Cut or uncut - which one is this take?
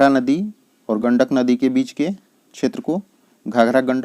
cut